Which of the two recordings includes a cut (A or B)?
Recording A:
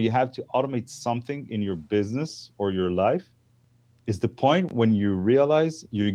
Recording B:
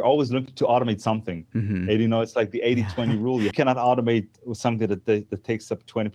B